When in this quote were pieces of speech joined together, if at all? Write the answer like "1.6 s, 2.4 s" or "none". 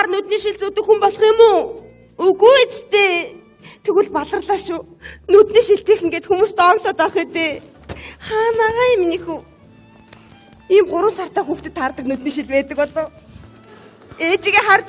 9.4 s